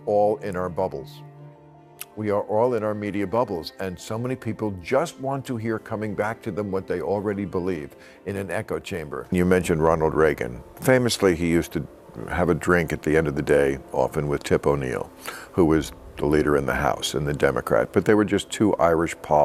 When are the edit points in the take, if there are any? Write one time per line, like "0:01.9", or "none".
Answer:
0:09.3